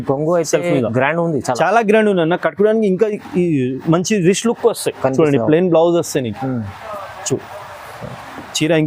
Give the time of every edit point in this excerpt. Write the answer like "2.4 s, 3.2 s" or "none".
none